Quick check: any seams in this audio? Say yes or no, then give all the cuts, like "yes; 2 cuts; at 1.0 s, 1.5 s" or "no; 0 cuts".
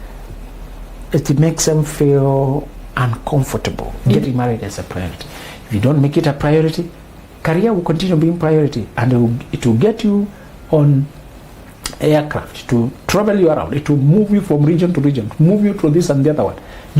yes; 1 cut; at 4.2 s